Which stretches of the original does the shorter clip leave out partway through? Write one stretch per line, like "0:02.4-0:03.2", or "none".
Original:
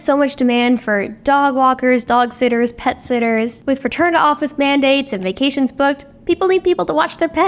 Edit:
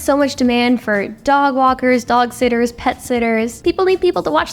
0:03.5-0:06.2